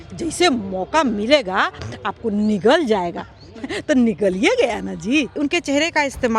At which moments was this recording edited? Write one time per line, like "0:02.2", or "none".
0:05.4